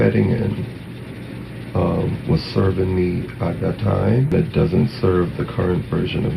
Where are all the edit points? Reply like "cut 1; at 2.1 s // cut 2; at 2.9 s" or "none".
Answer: cut 1; at 4.3 s